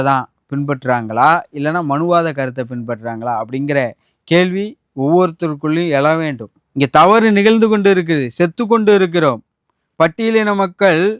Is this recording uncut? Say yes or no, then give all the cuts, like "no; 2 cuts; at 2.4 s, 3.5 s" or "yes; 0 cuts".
no; 1 cut; at 6.4 s